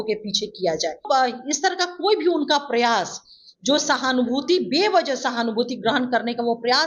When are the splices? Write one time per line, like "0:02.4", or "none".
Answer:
0:01.1